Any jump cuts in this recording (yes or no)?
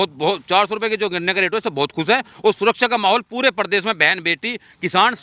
no